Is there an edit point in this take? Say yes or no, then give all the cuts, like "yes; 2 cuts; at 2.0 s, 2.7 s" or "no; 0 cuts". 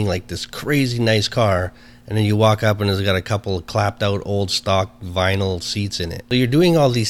yes; 1 cut; at 6.1 s